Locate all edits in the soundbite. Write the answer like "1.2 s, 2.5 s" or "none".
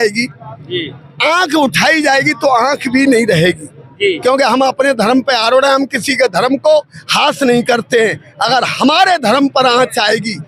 none